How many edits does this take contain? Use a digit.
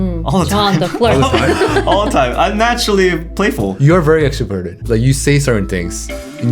1